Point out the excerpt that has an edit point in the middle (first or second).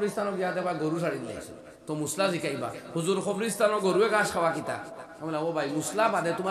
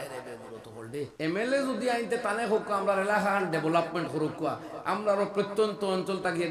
second